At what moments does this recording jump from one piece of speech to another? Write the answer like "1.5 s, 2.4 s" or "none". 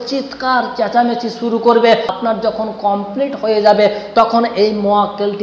2.1 s